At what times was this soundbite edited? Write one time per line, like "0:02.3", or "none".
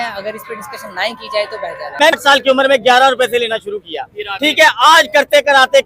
0:02.2

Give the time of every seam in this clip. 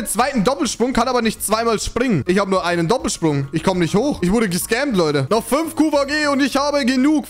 none

